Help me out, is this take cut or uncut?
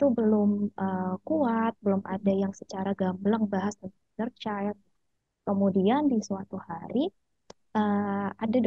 uncut